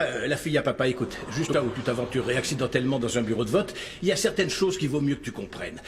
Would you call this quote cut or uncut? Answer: cut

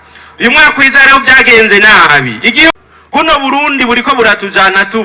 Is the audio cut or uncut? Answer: cut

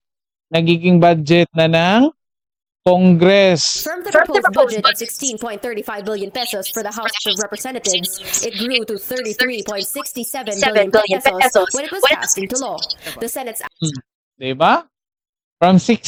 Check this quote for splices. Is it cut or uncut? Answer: uncut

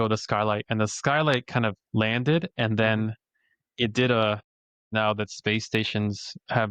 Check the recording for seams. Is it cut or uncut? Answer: cut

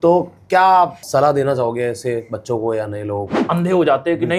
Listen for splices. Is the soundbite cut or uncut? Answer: cut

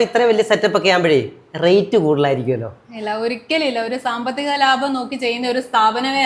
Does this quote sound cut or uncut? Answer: uncut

